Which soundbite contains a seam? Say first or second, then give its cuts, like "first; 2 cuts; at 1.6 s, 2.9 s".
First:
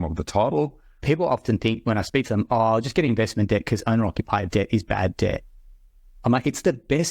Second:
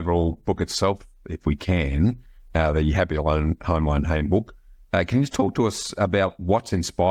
first; 1 cut; at 1.0 s